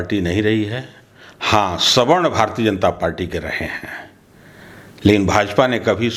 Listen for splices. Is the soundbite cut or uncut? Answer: uncut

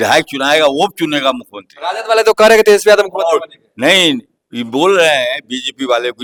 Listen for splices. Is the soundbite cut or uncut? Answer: uncut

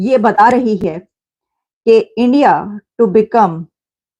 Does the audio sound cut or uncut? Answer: uncut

